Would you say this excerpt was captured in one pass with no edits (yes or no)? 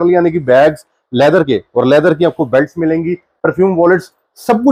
yes